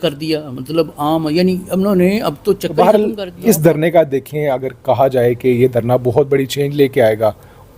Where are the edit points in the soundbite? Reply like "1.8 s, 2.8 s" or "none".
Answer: 2.8 s